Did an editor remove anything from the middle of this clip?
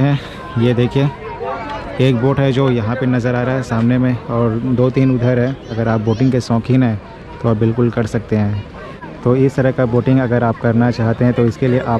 yes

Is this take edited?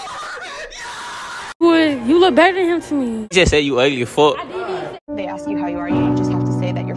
yes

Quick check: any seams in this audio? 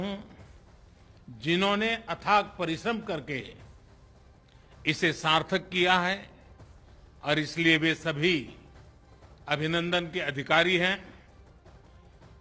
yes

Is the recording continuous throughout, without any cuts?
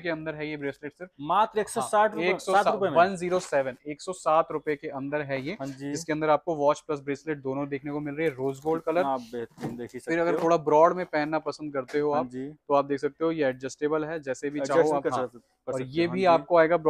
yes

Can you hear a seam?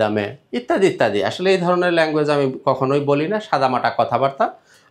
no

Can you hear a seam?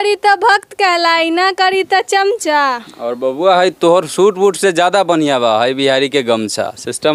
no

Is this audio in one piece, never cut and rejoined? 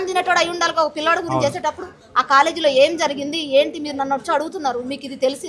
yes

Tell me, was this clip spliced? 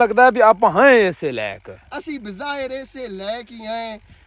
no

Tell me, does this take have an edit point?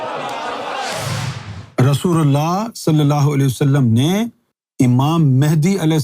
yes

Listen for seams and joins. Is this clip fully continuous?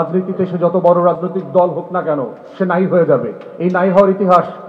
no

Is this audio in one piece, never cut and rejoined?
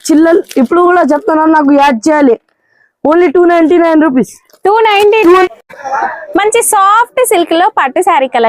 no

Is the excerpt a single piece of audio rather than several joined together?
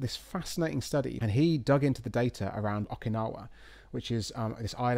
no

